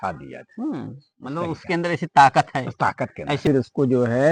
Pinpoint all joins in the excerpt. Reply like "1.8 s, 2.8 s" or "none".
3.4 s